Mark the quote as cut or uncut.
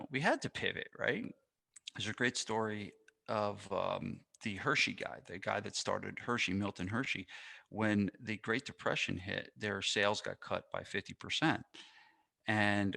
cut